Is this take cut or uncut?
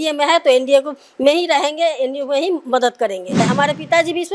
cut